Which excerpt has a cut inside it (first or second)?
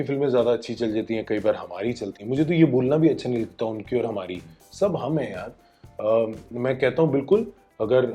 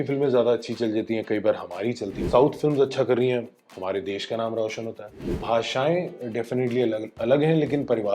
second